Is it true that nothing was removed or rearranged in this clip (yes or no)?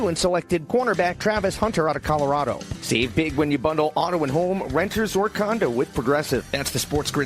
no